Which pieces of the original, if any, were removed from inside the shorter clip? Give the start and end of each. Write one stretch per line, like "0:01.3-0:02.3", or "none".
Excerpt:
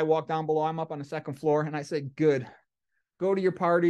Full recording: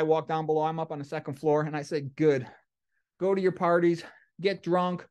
none